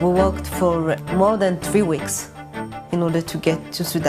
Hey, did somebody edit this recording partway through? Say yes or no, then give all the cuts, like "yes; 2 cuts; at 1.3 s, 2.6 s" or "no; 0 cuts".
yes; 1 cut; at 1.0 s